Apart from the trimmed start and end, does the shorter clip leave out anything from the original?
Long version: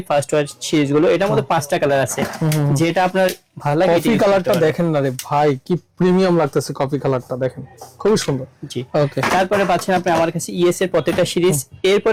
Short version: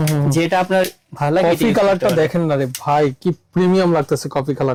no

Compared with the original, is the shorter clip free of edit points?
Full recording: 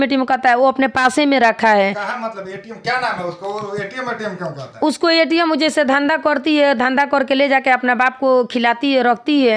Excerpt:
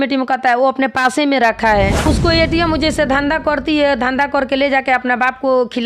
no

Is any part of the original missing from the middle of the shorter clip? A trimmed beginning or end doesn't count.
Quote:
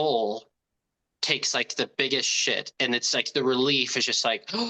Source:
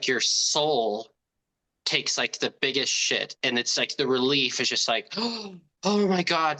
no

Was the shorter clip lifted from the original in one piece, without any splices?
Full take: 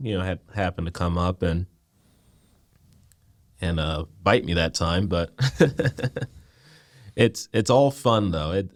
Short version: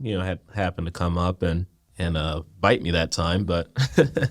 no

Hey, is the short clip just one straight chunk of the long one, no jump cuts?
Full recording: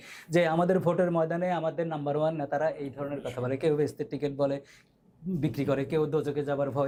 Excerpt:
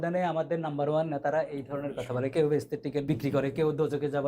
no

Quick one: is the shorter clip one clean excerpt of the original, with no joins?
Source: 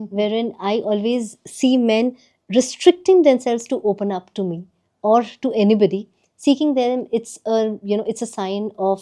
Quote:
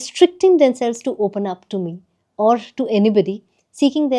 yes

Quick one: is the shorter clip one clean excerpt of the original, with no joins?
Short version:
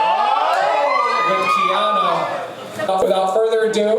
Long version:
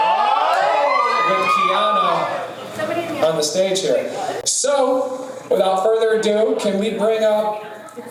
no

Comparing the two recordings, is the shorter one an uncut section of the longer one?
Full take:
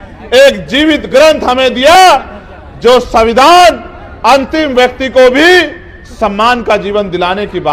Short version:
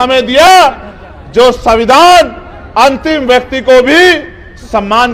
yes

